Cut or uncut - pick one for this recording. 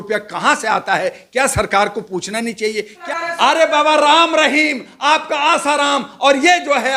cut